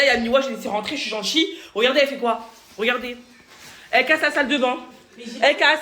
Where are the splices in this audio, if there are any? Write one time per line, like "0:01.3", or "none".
none